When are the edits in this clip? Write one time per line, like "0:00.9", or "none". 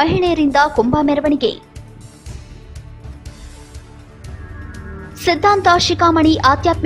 none